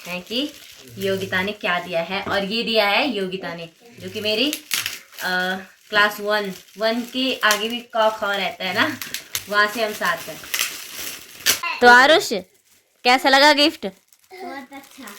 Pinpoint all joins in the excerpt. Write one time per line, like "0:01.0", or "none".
0:09.3
0:11.7